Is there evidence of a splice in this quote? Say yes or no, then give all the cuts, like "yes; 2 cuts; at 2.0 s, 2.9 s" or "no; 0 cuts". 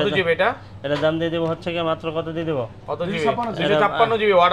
no; 0 cuts